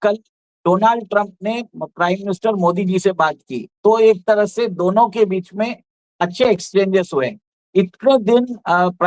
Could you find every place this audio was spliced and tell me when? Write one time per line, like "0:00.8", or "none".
none

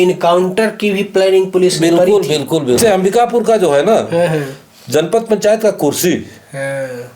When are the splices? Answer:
0:02.8

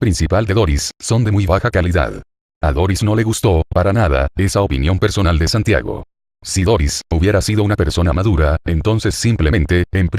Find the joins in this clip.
0:05.2

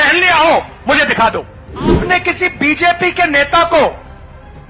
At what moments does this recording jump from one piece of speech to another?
0:02.0

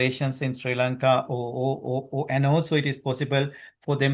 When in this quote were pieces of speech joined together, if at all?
none

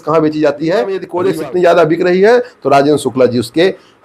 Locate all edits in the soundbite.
0:01.1

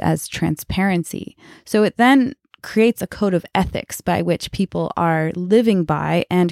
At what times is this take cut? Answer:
0:02.5

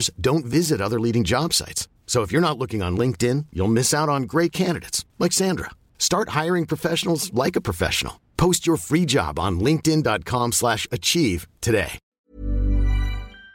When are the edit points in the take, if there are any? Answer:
0:12.0

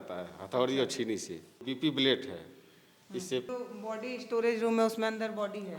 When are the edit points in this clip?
0:01.6
0:03.5

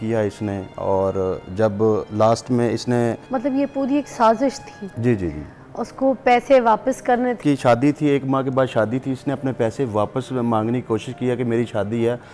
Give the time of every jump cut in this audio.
0:03.2
0:07.4

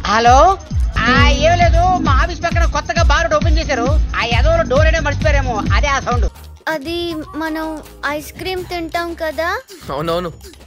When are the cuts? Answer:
0:00.9
0:06.3

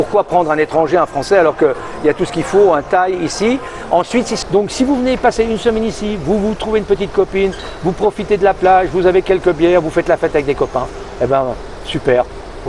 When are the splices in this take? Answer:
0:04.4

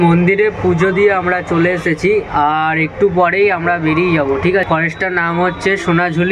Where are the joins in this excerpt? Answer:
0:04.7

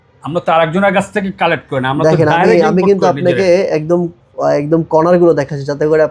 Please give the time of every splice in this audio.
none

